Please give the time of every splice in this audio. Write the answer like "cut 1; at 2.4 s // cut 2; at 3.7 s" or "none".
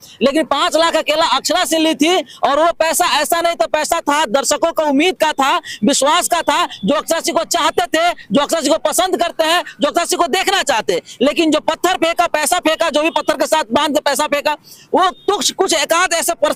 none